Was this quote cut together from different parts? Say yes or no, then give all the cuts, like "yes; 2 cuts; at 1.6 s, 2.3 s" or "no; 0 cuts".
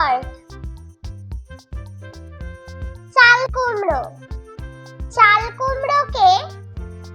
yes; 2 cuts; at 0.8 s, 3.1 s